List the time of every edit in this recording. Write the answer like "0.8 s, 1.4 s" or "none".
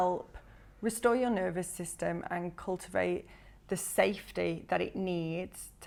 none

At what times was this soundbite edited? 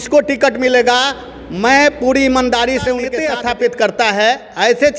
3.1 s

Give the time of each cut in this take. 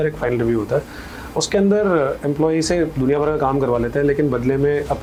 none

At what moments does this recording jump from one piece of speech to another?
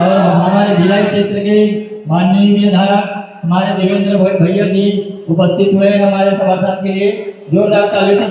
none

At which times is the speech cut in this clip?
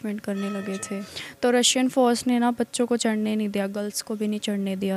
1.0 s, 2.3 s

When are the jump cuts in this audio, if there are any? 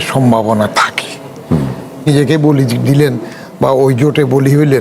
2.1 s

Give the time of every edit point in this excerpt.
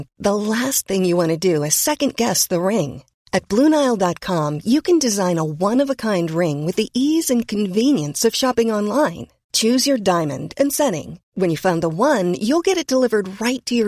none

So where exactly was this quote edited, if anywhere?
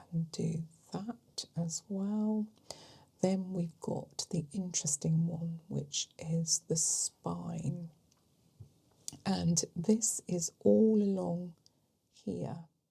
none

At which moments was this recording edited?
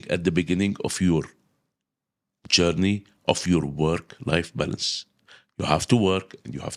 none

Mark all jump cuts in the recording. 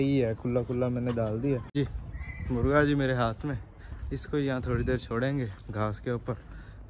1.7 s

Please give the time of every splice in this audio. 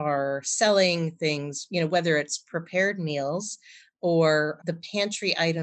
4.6 s

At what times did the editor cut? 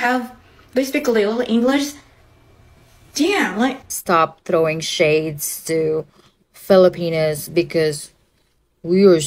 3.9 s

